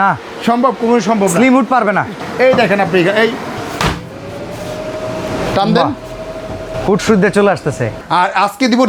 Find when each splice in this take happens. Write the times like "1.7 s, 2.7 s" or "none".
2.1 s, 3.6 s, 6.7 s, 7.9 s